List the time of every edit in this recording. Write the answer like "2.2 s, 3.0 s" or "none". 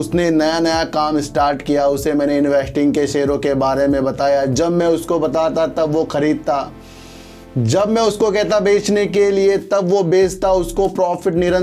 none